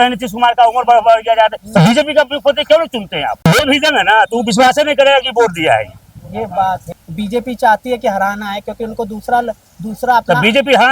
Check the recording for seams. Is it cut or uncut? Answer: cut